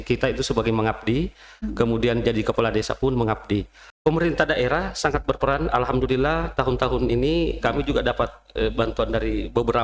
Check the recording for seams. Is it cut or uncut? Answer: cut